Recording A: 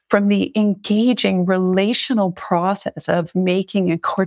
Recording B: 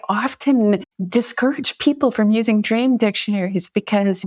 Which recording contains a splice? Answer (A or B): B